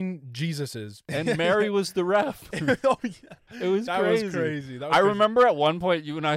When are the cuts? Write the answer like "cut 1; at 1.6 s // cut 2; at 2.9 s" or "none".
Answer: cut 1; at 1.0 s

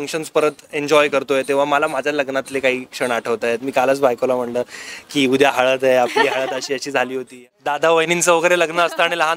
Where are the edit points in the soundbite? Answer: cut 1; at 7.3 s

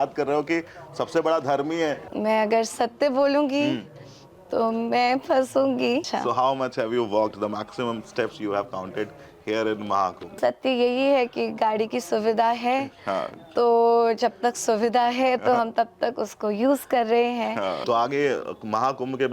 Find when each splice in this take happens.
cut 1; at 2.1 s // cut 2; at 6.1 s // cut 3; at 10.3 s // cut 4; at 17.8 s

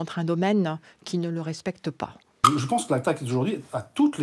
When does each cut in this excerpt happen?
cut 1; at 2.4 s

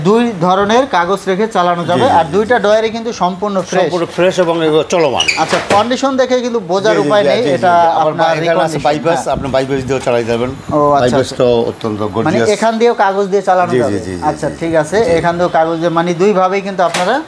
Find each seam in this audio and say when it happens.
none

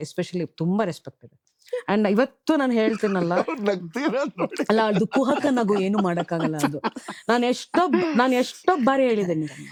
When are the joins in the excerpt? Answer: none

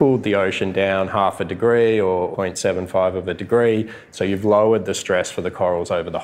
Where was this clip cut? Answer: cut 1; at 2.3 s // cut 2; at 4.1 s

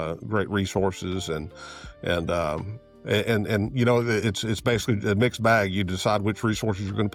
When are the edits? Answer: none

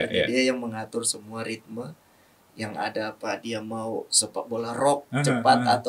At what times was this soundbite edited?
none

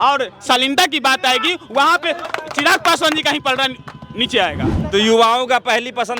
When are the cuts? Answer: cut 1; at 2.3 s // cut 2; at 4.8 s

